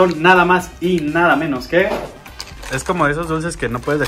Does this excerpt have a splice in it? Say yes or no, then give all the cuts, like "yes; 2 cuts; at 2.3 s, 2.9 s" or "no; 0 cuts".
yes; 1 cut; at 2.2 s